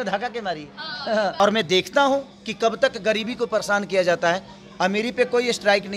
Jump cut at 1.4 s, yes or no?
yes